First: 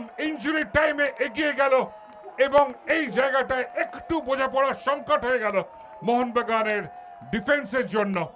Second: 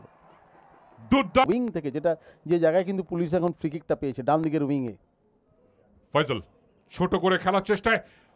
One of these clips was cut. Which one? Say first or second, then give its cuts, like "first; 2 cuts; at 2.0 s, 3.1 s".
second; 1 cut; at 1.4 s